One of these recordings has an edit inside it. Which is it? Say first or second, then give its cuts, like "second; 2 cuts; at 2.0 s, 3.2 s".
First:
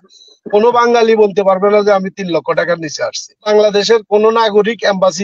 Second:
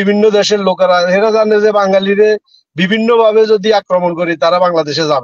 first; 1 cut; at 3.5 s